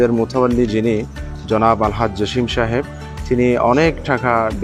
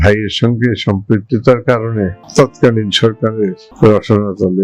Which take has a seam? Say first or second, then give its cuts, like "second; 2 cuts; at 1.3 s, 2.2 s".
second; 2 cuts; at 2.2 s, 3.6 s